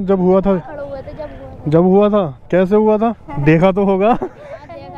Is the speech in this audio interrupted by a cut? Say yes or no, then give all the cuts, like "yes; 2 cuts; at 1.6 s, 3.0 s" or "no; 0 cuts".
yes; 1 cut; at 3.3 s